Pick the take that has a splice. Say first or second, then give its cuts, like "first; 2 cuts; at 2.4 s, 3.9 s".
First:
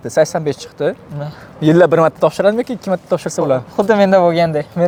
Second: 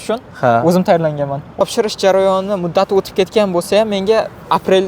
second; 1 cut; at 1.6 s